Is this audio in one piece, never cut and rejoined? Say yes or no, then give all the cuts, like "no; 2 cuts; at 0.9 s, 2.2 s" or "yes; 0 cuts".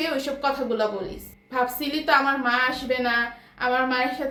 yes; 0 cuts